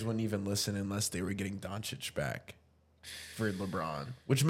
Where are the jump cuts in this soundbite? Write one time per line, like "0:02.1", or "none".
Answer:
none

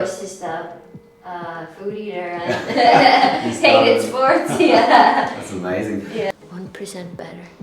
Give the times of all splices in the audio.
0:06.4

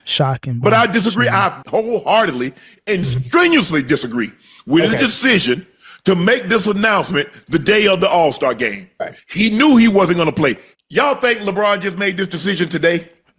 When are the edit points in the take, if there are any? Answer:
0:01.6
0:10.6

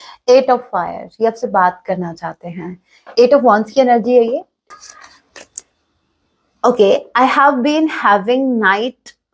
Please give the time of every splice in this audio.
0:04.6

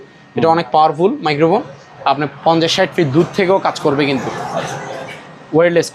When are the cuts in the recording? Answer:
none

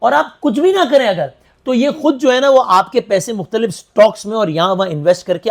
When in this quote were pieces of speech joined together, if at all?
none

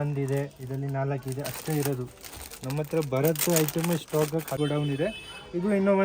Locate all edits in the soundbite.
0:04.6

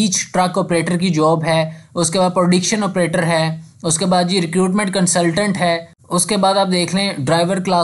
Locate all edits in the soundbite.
none

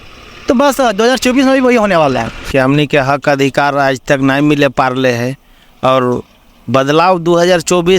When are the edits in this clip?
0:02.4

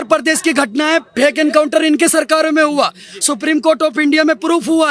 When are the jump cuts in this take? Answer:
none

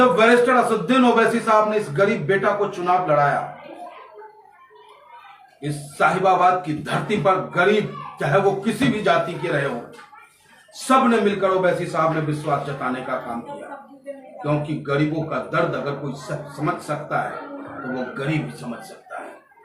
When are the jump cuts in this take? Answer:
none

